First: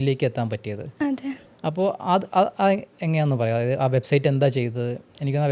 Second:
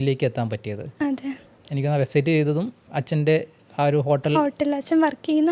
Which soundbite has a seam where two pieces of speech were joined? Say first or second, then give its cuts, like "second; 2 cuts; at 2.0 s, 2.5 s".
second; 2 cuts; at 1.5 s, 2.8 s